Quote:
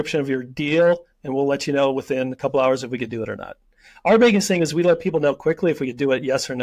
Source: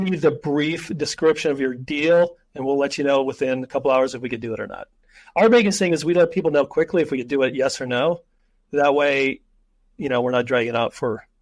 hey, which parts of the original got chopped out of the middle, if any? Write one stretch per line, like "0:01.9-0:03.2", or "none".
none